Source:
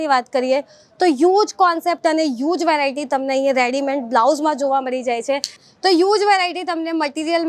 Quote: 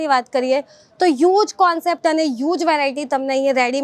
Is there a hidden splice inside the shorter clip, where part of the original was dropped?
no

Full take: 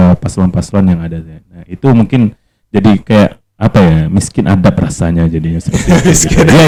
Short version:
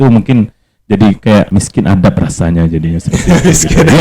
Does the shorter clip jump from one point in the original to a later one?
yes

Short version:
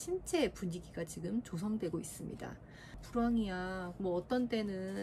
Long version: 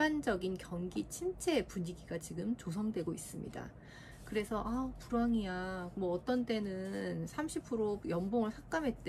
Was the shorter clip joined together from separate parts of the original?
yes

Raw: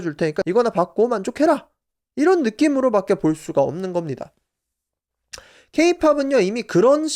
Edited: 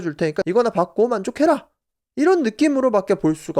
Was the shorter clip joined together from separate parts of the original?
no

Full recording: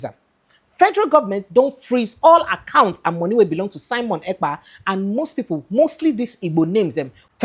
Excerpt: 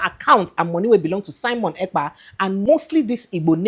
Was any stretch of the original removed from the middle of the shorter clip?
yes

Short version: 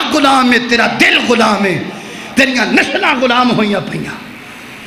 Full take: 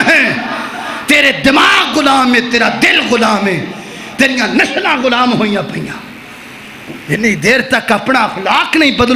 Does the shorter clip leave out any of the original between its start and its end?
no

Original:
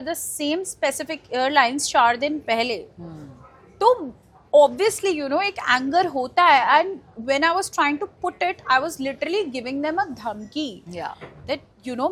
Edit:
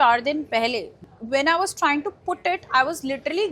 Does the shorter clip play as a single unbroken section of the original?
no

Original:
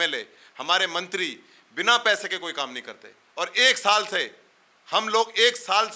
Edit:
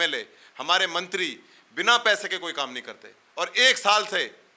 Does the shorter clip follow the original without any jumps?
yes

